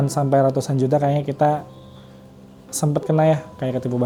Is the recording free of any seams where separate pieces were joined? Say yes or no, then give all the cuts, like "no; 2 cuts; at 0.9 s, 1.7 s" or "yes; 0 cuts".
yes; 0 cuts